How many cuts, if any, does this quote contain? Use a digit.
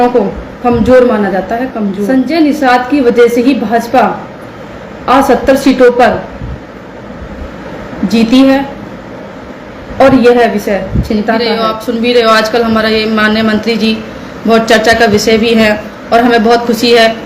2